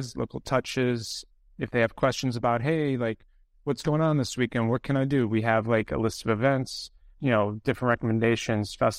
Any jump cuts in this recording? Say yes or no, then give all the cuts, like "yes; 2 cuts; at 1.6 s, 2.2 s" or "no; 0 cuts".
yes; 2 cuts; at 1.2 s, 7.1 s